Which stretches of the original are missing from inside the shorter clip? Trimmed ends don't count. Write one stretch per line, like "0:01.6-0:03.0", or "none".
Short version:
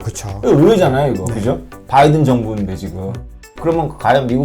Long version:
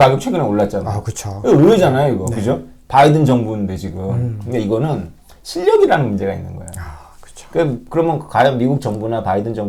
0:04.5-0:07.8